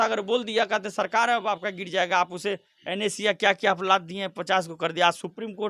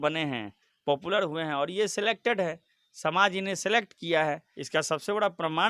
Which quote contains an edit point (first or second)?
second